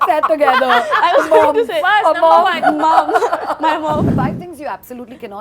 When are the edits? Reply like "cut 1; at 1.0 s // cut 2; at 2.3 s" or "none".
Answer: cut 1; at 4.1 s